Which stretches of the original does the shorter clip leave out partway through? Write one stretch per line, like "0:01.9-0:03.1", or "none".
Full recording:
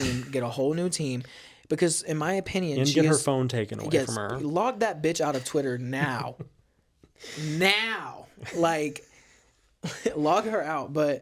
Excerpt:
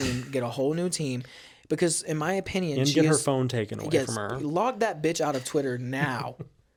none